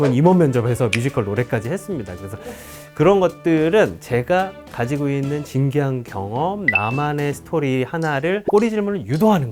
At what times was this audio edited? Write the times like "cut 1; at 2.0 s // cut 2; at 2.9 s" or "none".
none